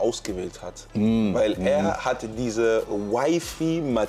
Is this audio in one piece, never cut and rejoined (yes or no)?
yes